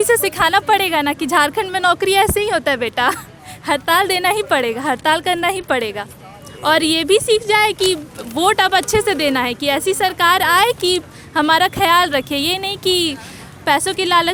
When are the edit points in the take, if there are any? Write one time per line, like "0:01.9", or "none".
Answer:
none